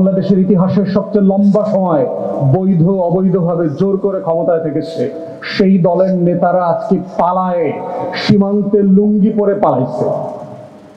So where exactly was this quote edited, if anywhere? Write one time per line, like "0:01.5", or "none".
none